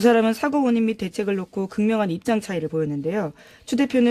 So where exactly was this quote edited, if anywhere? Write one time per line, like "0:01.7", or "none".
0:02.6